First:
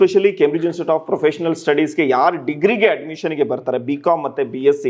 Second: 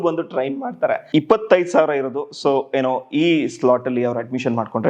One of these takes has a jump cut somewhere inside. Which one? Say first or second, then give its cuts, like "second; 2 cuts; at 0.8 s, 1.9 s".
second; 1 cut; at 1.0 s